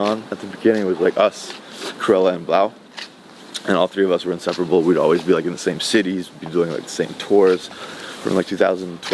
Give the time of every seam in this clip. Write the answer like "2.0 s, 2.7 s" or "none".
none